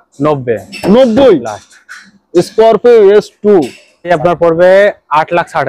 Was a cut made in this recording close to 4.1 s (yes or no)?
yes